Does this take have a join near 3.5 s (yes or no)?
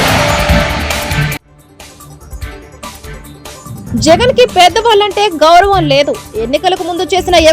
yes